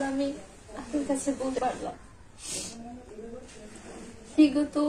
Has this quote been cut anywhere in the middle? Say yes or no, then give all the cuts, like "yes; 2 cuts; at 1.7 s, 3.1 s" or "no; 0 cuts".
yes; 1 cut; at 1.6 s